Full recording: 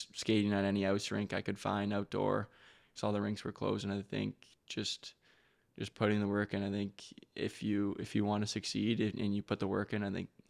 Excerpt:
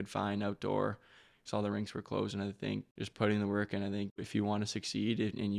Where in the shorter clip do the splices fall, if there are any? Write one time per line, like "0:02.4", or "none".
0:03.0
0:04.2